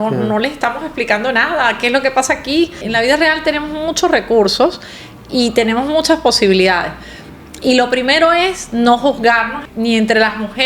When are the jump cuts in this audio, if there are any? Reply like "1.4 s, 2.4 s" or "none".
2.8 s, 9.6 s